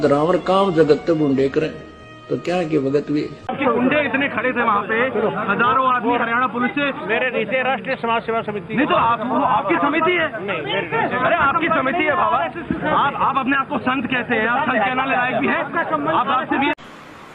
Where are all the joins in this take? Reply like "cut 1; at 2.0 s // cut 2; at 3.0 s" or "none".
none